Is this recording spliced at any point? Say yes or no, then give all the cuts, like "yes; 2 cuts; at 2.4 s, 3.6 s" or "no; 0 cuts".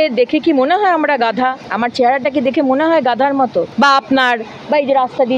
yes; 2 cuts; at 1.6 s, 3.7 s